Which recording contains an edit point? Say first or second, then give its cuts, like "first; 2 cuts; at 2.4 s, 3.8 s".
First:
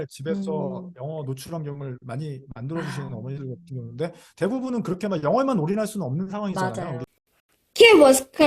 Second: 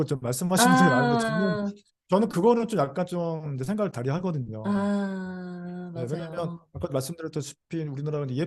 first; 1 cut; at 7.1 s